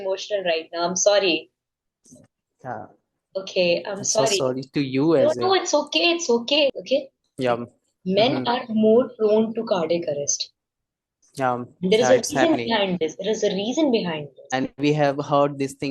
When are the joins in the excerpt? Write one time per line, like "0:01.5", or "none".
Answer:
0:06.7
0:14.5